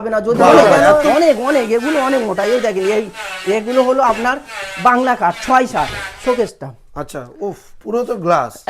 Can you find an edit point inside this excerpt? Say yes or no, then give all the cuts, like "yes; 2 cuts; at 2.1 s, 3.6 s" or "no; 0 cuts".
yes; 2 cuts; at 1.1 s, 6.1 s